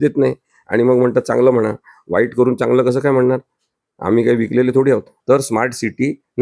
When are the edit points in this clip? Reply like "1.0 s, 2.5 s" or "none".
5.1 s

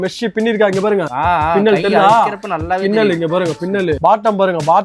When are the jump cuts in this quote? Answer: none

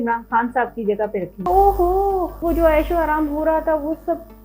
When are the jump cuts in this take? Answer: 1.4 s, 2.4 s

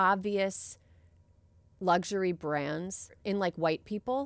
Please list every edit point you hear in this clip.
3.2 s

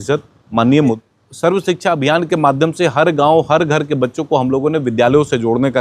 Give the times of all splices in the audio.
1.0 s

